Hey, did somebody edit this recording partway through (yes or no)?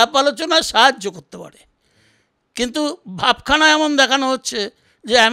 no